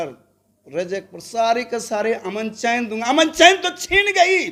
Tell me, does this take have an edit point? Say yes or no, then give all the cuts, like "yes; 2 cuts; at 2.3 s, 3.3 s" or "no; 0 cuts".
no; 0 cuts